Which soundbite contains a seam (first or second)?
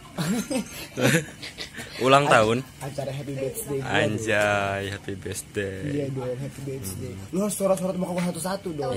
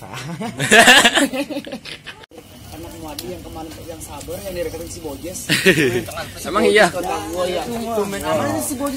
second